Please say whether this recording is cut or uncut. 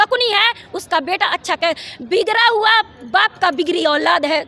uncut